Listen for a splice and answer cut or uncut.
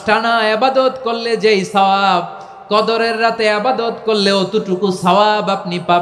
uncut